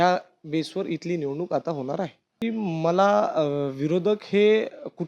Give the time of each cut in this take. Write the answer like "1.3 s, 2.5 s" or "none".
2.3 s